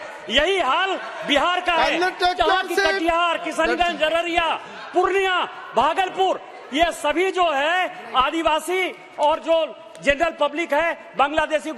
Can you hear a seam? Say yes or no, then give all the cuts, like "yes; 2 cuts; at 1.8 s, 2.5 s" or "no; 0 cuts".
no; 0 cuts